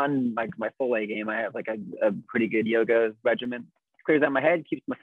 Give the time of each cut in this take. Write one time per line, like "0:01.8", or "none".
0:03.9